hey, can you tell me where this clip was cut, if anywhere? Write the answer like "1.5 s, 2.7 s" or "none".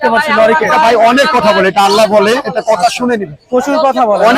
none

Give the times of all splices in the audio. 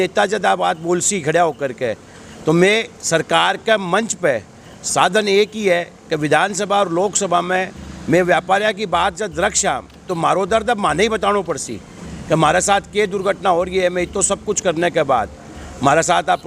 none

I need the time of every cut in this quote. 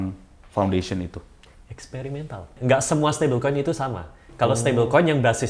2.5 s

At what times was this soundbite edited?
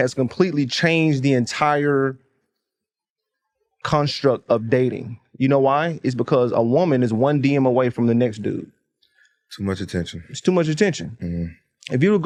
none

